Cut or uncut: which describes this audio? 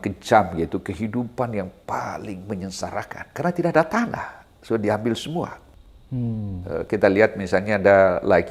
uncut